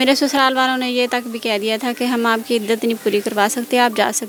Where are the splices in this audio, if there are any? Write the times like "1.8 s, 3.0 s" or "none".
none